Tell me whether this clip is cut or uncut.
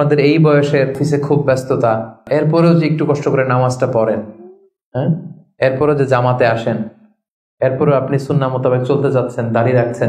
cut